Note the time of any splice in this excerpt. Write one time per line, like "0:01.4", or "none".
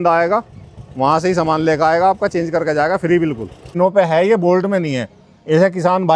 0:03.7